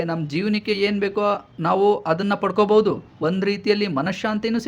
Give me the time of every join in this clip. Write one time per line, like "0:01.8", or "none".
none